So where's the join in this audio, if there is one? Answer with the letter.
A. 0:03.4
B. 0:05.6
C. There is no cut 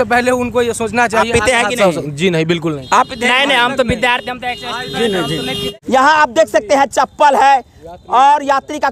B